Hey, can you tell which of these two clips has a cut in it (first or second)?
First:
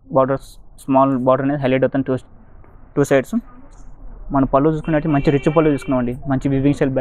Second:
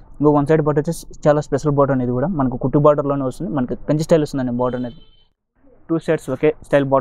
second